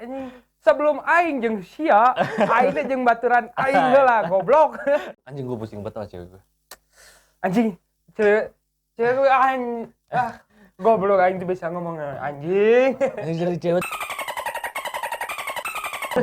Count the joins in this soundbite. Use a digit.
1